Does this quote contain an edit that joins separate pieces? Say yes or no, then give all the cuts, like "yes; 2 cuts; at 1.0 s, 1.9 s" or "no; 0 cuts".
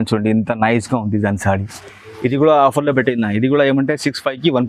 no; 0 cuts